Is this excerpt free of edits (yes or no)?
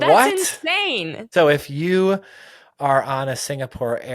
no